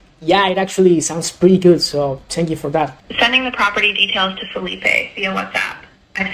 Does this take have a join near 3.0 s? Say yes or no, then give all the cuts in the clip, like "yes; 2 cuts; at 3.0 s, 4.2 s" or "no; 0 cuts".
yes; 1 cut; at 3.0 s